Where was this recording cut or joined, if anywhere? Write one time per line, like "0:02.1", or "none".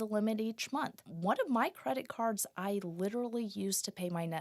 0:01.1